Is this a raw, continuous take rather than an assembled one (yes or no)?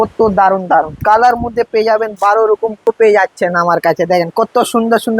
no